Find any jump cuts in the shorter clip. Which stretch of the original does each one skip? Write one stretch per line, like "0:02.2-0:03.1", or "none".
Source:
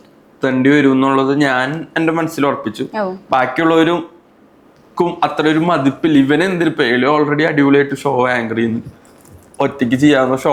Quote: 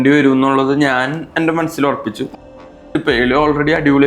0:03.3-0:06.4